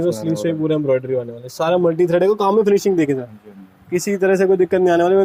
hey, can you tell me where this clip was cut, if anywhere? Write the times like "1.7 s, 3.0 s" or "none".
none